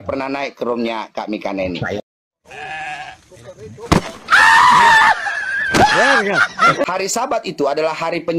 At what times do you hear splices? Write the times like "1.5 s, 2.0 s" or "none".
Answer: 6.8 s